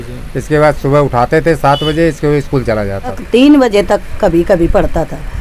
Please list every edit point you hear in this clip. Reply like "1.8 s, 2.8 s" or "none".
3.2 s